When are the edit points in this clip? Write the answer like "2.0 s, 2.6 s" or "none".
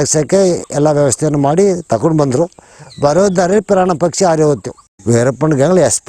4.9 s